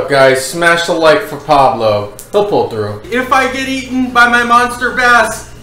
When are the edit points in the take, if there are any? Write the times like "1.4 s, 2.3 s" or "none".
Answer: 3.1 s